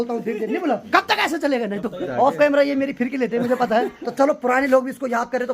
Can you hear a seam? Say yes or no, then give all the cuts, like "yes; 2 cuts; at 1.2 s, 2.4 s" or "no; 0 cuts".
yes; 3 cuts; at 0.8 s, 2.0 s, 4.0 s